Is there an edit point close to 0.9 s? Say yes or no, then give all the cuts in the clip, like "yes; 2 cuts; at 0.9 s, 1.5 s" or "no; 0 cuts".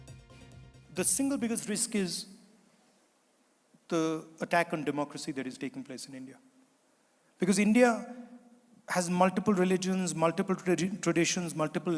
yes; 1 cut; at 0.9 s